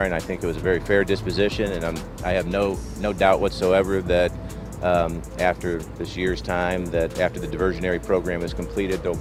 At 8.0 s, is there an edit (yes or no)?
no